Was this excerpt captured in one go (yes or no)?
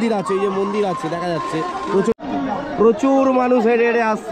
no